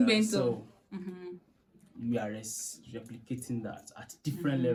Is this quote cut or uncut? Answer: uncut